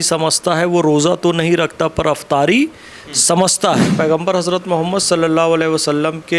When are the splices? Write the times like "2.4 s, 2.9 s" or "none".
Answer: 3.9 s

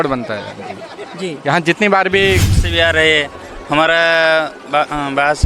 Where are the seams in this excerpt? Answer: 2.6 s

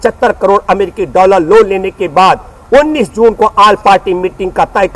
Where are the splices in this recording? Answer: none

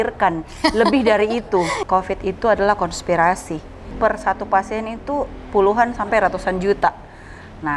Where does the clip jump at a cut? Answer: 1.8 s, 3.9 s

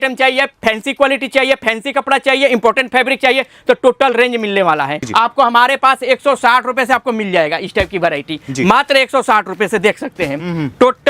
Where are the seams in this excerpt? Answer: 5.0 s

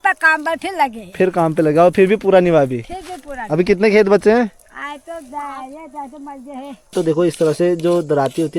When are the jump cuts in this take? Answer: 6.9 s

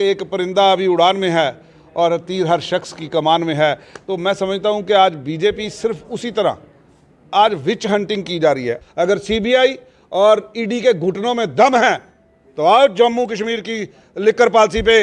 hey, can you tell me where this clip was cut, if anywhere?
8.8 s

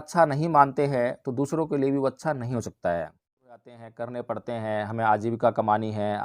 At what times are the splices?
3.8 s

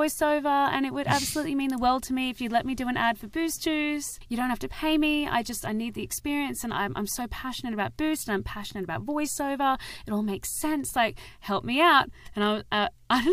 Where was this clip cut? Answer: none

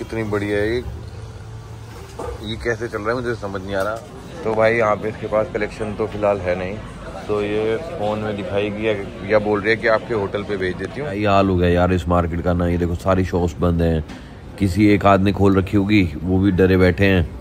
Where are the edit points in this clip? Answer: 4.1 s, 11.2 s

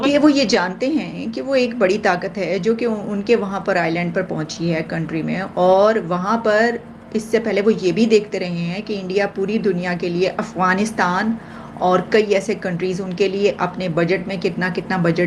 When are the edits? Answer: none

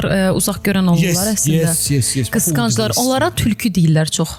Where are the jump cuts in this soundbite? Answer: none

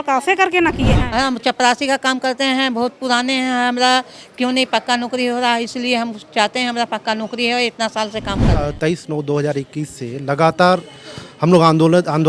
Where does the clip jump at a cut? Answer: 1.0 s, 8.6 s

